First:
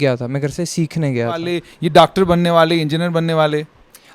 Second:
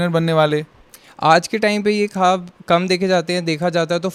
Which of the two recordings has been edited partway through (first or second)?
first